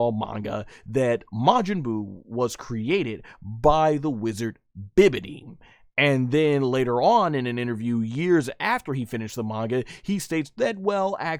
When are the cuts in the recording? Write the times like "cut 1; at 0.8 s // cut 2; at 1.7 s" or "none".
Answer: none